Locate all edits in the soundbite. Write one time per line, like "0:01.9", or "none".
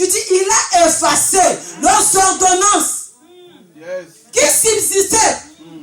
none